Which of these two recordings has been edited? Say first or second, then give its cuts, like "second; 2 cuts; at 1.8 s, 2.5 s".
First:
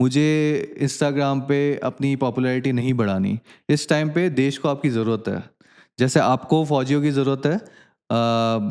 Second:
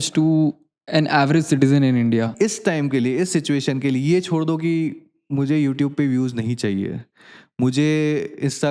second; 1 cut; at 2.3 s